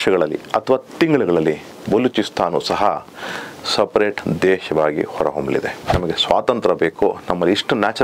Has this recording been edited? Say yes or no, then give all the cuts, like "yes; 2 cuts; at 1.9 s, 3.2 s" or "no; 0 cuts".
yes; 1 cut; at 6.0 s